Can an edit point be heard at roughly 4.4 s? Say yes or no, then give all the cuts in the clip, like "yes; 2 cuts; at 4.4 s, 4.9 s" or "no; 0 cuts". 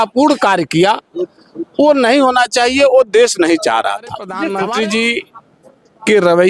yes; 1 cut; at 4.4 s